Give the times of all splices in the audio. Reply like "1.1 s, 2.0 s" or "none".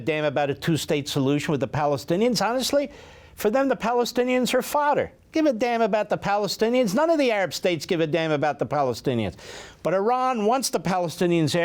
none